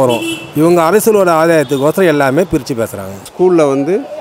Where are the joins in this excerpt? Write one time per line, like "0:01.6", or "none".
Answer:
0:03.2